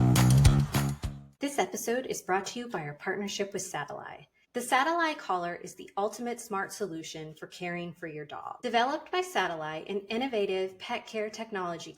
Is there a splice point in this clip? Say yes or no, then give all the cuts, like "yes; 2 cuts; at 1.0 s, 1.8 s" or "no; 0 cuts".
no; 0 cuts